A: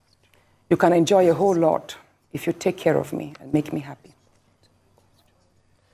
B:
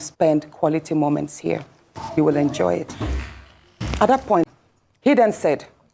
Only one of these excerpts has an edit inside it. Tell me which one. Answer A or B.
B